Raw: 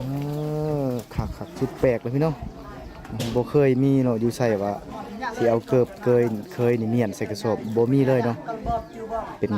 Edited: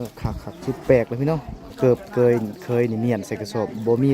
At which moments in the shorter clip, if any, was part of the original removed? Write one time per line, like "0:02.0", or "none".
0:01.7